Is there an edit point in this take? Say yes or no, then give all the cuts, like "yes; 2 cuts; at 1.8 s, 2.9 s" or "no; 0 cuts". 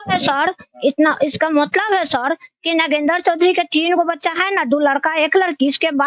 no; 0 cuts